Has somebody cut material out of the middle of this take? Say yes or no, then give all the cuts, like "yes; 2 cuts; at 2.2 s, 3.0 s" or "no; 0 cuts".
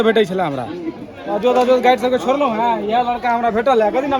no; 0 cuts